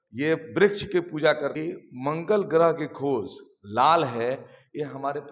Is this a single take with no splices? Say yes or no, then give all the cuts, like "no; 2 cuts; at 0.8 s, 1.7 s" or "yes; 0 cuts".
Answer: no; 1 cut; at 1.6 s